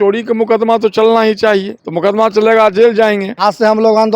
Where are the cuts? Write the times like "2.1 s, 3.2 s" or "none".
1.8 s, 3.3 s